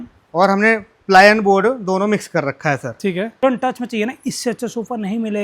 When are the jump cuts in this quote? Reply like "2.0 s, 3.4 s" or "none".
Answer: 3.4 s